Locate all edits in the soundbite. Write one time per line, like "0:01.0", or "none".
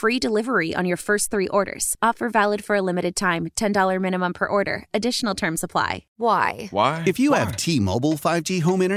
0:06.0